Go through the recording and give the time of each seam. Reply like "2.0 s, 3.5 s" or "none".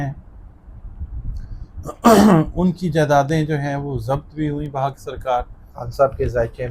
5.8 s